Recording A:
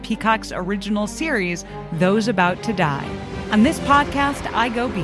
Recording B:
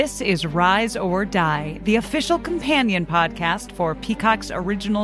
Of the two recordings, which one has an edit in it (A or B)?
A